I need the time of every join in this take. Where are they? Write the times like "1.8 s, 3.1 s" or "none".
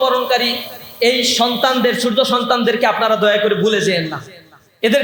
none